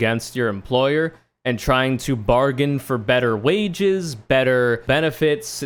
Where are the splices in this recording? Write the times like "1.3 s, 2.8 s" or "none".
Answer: none